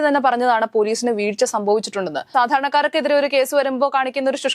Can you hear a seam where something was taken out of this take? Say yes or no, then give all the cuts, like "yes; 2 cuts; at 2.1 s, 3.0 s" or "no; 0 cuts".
yes; 1 cut; at 2.3 s